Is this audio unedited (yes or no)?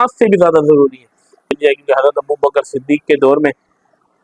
no